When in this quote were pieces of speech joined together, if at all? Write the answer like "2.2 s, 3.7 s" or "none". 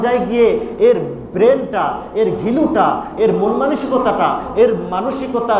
none